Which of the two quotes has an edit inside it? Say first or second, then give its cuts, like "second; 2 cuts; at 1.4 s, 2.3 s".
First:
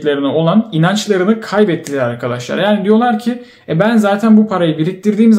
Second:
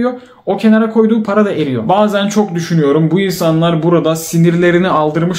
second; 1 cut; at 1.8 s